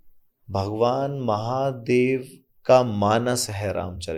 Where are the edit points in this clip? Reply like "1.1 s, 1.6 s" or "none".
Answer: none